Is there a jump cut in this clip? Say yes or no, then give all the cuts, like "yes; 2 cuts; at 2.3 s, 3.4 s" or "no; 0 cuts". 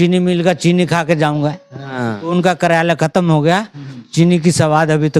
no; 0 cuts